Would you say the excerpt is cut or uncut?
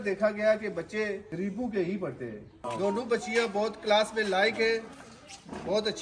cut